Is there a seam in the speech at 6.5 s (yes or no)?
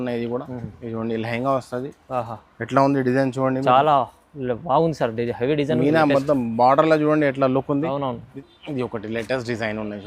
no